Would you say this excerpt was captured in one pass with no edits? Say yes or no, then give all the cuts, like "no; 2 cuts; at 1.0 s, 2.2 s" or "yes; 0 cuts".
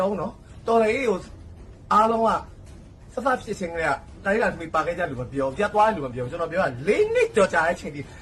no; 1 cut; at 1.2 s